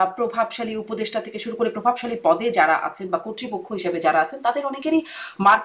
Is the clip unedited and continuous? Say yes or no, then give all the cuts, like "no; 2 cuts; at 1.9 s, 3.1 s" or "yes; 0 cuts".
yes; 0 cuts